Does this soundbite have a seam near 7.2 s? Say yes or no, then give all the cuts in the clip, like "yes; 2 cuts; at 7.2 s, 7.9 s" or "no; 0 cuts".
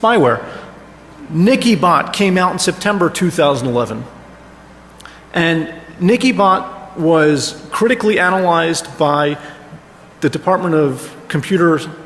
yes; 1 cut; at 7.2 s